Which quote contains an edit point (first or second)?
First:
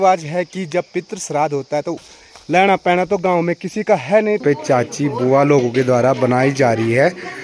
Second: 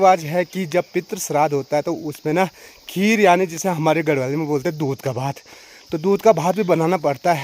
first